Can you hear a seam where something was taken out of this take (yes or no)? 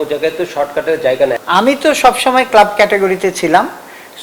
yes